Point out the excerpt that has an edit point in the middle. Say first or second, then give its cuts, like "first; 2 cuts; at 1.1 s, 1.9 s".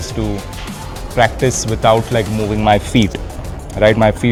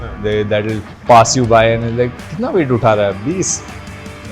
second; 1 cut; at 0.9 s